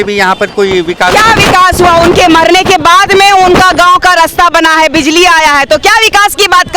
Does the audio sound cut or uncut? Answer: uncut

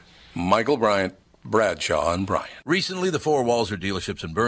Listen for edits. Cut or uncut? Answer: cut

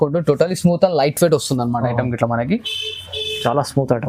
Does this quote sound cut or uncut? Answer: uncut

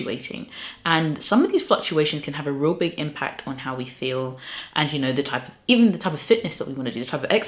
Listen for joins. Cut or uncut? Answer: uncut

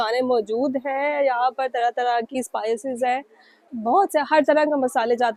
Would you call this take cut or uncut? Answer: uncut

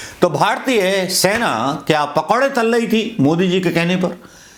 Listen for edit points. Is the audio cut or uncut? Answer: uncut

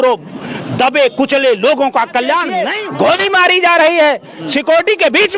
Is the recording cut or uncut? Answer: cut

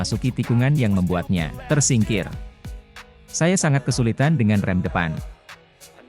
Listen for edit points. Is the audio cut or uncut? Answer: cut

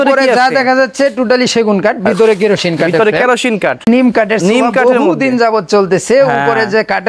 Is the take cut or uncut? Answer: cut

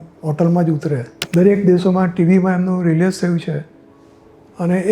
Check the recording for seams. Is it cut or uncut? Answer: cut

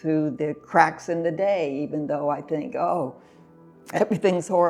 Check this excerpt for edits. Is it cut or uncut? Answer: uncut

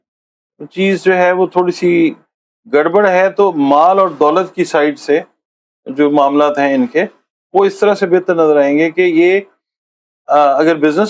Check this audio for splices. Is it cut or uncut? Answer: uncut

